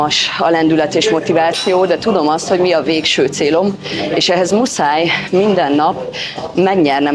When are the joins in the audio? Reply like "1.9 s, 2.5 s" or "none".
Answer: none